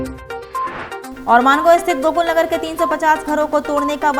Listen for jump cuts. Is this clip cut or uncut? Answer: uncut